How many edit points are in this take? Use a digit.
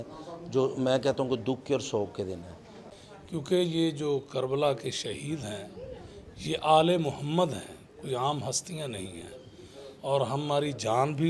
1